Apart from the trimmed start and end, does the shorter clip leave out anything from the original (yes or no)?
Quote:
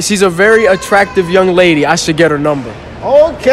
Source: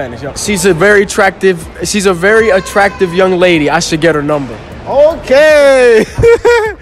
no